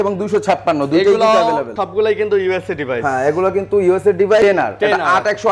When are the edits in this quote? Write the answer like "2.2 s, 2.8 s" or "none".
1.8 s, 4.4 s